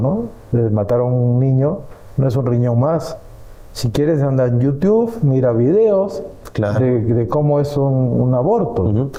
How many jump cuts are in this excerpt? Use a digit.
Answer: 0